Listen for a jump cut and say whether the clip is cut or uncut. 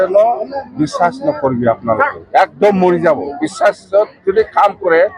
uncut